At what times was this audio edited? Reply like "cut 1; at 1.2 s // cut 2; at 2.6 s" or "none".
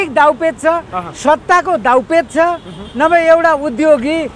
none